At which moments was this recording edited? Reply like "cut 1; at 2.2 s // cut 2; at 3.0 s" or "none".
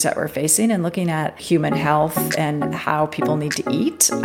cut 1; at 1.4 s